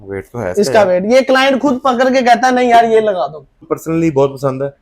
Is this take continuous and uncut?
no; 1 cut; at 3.7 s

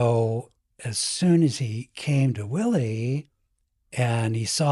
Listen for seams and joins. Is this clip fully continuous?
yes; 0 cuts

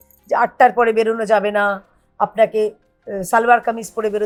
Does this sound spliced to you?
no; 0 cuts

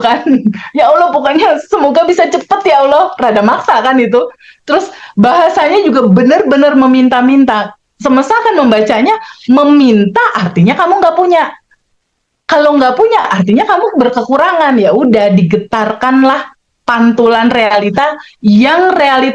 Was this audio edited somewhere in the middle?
no; 0 cuts

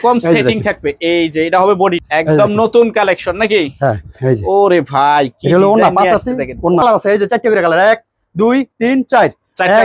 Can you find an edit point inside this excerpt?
yes; 2 cuts; at 2.0 s, 6.8 s

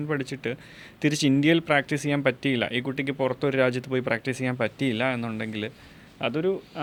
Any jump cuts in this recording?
no; 0 cuts

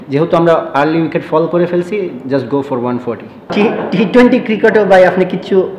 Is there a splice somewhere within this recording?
yes; 1 cut; at 3.3 s

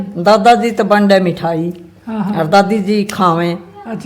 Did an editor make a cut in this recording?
no; 0 cuts

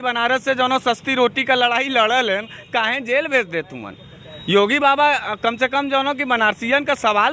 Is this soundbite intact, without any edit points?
yes; 0 cuts

